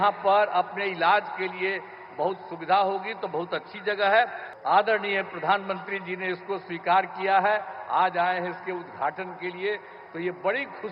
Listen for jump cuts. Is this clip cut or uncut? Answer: cut